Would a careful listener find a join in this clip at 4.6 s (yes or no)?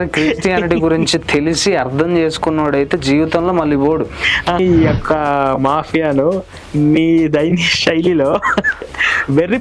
yes